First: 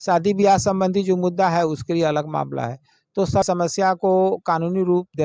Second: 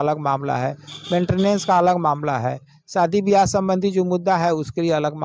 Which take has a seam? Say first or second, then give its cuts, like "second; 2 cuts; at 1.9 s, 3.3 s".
first; 1 cut; at 3.5 s